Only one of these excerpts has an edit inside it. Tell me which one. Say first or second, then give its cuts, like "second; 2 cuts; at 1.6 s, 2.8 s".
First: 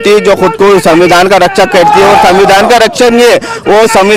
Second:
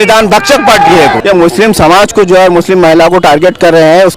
second; 1 cut; at 1.2 s